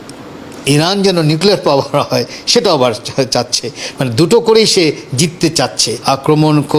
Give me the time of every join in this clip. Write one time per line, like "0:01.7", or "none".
0:05.9